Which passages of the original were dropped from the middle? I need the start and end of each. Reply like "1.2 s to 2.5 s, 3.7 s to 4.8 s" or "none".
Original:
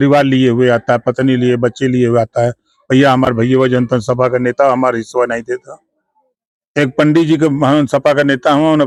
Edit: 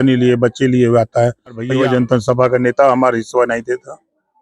2.9 s to 3.5 s